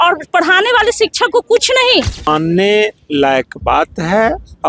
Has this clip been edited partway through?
yes; 1 cut; at 2.2 s

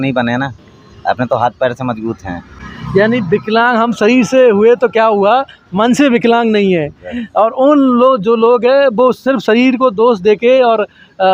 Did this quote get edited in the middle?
no; 0 cuts

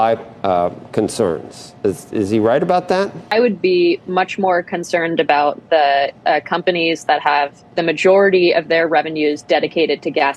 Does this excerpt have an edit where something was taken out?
yes; 1 cut; at 3.3 s

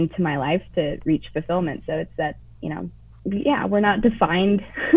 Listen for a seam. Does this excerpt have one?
yes; 1 cut; at 3.0 s

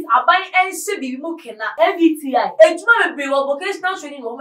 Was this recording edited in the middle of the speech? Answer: yes; 1 cut; at 1.8 s

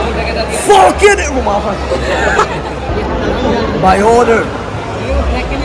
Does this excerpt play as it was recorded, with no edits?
no; 1 cut; at 2.9 s

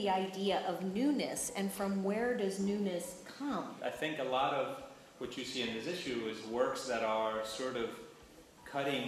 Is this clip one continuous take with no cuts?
no; 1 cut; at 3.7 s

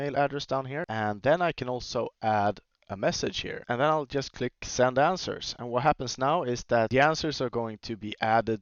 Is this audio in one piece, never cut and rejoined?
no; 3 cuts; at 0.9 s, 3.5 s, 6.9 s

